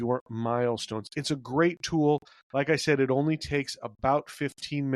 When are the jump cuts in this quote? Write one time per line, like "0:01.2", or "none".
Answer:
none

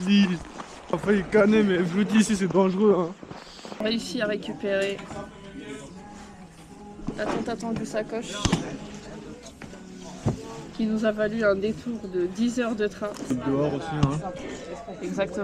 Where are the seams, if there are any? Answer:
0:00.9
0:03.8
0:13.3

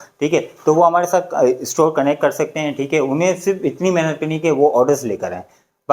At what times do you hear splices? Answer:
none

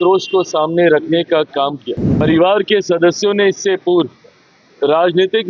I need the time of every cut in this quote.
0:02.0

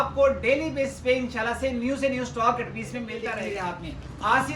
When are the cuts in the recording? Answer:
0:03.2

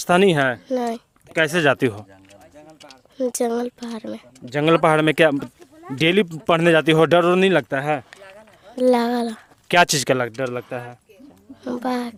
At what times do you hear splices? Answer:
none

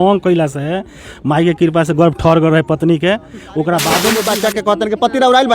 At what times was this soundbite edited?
0:04.1

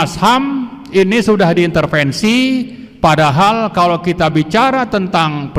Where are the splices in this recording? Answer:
none

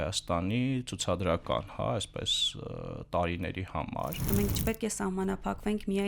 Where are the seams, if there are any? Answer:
0:04.3

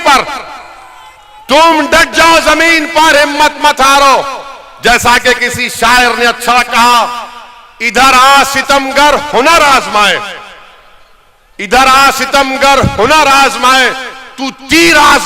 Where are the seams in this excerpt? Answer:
none

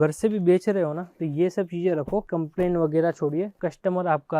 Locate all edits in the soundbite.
0:02.3

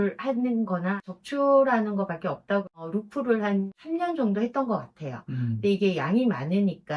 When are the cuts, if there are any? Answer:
0:01.0
0:02.7
0:03.7

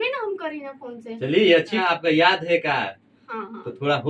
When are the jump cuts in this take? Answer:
0:01.8

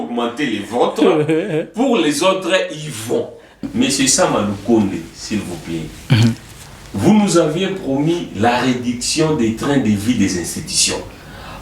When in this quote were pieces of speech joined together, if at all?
0:03.7

